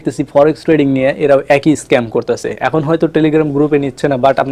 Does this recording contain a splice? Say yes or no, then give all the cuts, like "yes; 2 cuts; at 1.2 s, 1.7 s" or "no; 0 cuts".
no; 0 cuts